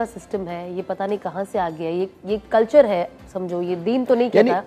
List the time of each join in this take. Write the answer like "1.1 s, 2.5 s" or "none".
none